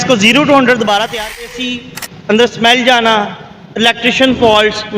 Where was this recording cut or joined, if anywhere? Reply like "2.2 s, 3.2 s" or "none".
1.5 s